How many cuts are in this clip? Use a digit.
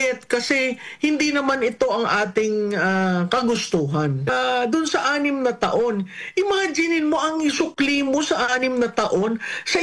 1